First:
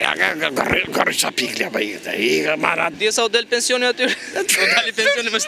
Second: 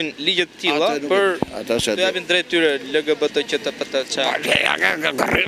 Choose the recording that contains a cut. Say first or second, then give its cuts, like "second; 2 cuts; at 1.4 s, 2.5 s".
first; 1 cut; at 3.0 s